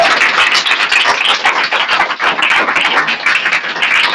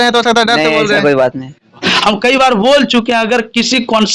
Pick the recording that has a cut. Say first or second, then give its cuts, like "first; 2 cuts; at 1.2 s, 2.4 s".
second; 1 cut; at 1.9 s